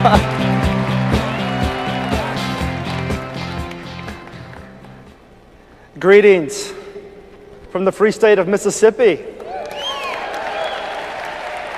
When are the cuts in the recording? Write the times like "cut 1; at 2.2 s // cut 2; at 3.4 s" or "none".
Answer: cut 1; at 1.4 s